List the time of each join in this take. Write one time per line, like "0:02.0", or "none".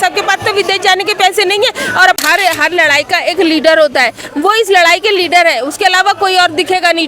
0:02.2